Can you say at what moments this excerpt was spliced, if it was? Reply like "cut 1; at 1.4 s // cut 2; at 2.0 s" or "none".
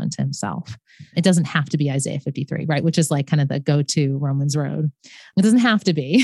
cut 1; at 1.1 s // cut 2; at 5.3 s